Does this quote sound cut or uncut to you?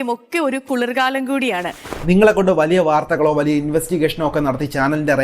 cut